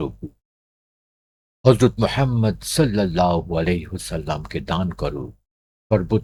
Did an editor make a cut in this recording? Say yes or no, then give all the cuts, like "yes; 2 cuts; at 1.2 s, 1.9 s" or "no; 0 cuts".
no; 0 cuts